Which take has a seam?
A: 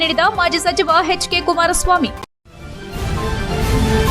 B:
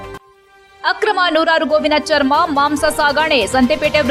A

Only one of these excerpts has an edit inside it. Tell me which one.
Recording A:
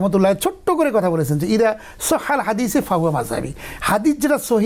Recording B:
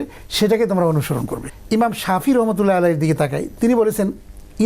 B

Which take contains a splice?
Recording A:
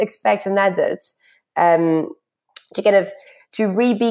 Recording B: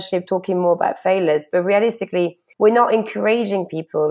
B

